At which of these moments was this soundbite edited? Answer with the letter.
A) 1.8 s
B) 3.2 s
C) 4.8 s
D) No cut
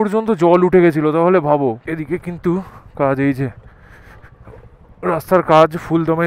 A